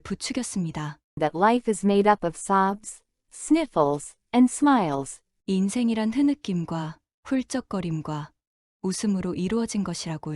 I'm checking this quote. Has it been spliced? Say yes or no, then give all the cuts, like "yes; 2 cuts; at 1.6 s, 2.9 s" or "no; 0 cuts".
yes; 2 cuts; at 1.0 s, 5.4 s